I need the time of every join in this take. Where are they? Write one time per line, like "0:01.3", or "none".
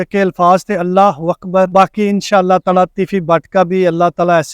0:01.7